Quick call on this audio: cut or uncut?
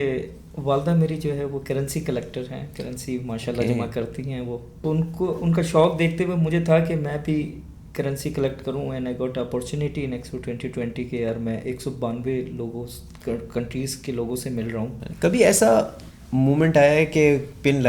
cut